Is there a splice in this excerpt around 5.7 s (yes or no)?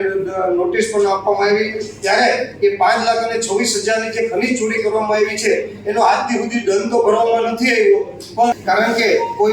no